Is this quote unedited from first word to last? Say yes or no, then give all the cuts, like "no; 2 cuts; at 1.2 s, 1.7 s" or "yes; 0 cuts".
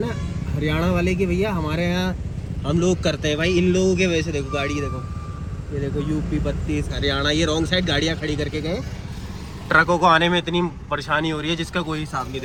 yes; 0 cuts